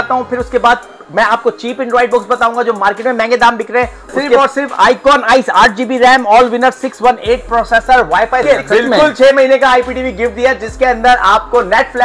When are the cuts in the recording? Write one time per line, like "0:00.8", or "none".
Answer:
0:04.4
0:08.5